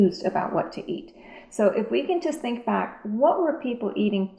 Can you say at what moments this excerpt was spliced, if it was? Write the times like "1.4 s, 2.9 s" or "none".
none